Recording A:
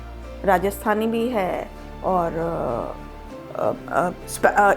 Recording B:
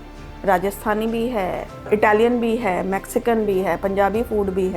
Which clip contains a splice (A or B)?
B